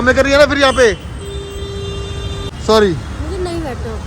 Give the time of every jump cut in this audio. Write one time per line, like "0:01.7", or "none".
0:02.5